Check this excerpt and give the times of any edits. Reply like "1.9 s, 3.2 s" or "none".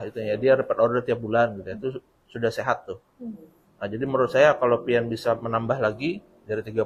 none